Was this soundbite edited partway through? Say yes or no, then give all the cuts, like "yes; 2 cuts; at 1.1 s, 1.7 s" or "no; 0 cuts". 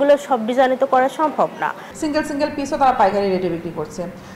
yes; 1 cut; at 1.9 s